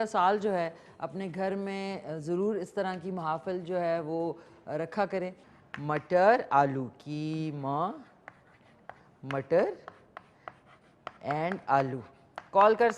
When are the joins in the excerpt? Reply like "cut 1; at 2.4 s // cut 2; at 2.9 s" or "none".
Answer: cut 1; at 5.4 s